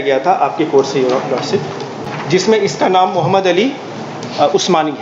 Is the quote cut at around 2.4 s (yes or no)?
yes